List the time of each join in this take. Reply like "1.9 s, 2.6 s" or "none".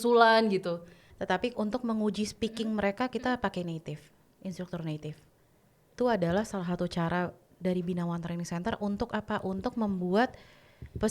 1.1 s, 5.9 s